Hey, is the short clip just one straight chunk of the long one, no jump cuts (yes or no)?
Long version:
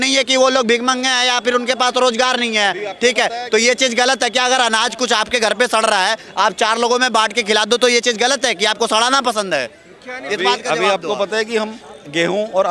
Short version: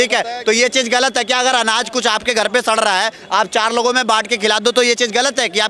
yes